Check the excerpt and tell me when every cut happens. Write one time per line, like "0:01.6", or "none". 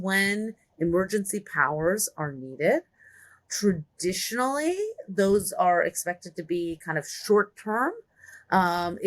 none